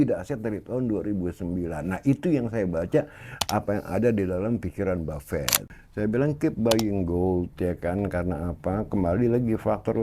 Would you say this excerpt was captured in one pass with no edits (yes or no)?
no